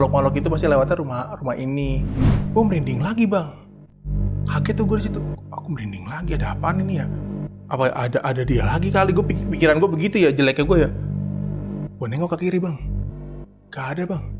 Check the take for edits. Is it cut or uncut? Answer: cut